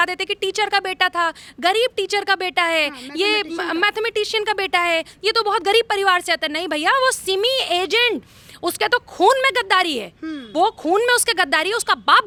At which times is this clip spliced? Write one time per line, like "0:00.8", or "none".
none